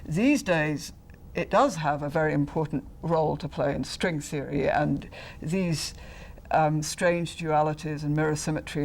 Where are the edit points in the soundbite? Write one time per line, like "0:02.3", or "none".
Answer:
0:03.9